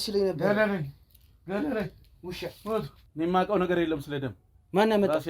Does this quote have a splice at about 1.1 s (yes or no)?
no